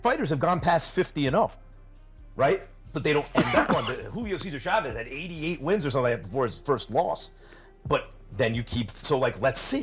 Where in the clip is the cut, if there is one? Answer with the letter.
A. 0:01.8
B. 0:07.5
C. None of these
C